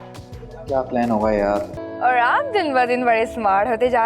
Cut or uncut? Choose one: cut